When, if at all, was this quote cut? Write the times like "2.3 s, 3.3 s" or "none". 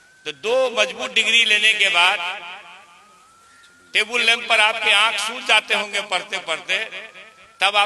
none